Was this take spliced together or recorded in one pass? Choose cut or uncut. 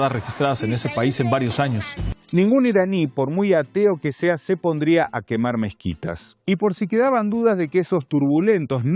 uncut